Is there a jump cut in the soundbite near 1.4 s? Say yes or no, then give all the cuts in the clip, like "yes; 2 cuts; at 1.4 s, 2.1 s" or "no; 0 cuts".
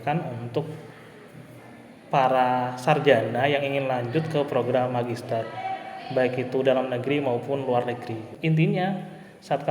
no; 1 cut; at 8.3 s